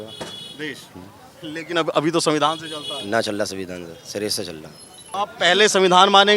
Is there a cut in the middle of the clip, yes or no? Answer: yes